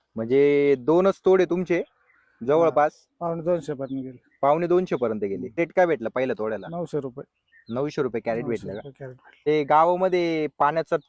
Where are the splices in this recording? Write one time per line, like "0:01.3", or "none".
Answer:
0:05.6
0:09.5